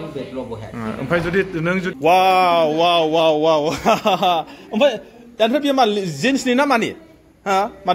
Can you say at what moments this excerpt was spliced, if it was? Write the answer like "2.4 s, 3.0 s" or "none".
1.9 s